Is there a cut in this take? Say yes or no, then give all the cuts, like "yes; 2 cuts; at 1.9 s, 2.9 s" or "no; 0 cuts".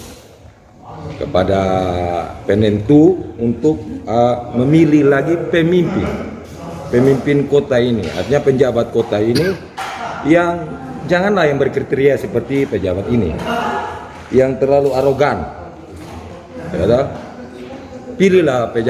no; 0 cuts